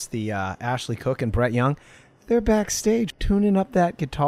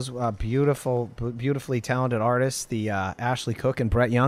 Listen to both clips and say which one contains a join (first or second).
first